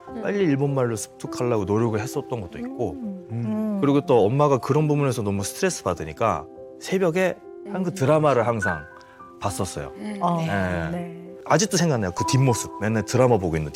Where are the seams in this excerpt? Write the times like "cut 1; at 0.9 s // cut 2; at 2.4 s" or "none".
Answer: cut 1; at 11.3 s